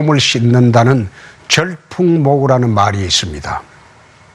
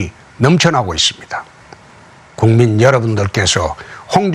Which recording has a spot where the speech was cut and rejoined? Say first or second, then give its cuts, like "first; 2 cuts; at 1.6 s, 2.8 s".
second; 1 cut; at 1.3 s